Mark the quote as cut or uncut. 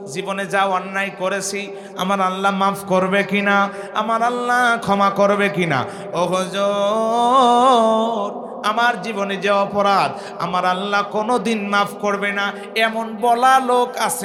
uncut